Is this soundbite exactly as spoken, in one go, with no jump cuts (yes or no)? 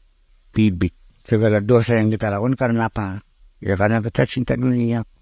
no